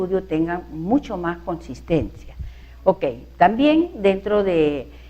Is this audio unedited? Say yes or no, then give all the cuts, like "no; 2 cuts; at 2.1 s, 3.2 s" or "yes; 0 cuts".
no; 1 cut; at 1.0 s